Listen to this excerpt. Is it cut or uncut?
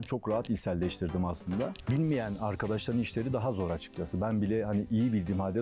cut